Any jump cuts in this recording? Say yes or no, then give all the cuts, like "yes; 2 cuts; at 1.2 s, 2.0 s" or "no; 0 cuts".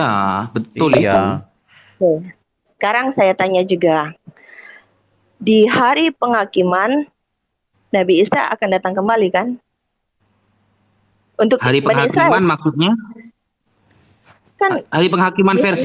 no; 0 cuts